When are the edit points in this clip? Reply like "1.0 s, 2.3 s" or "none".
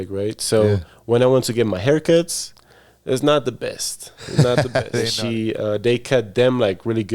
5.1 s